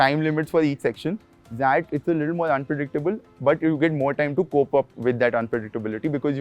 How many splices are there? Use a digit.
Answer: 1